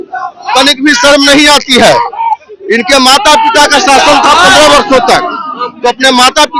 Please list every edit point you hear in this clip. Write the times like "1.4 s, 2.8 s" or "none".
none